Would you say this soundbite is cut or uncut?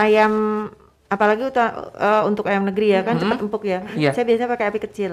uncut